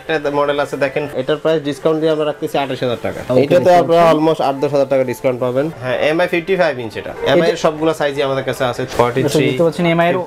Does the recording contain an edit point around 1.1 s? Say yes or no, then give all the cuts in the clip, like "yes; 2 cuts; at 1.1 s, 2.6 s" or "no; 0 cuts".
yes; 4 cuts; at 1.1 s, 3.3 s, 5.7 s, 8.9 s